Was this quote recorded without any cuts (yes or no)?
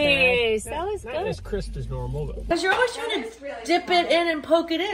no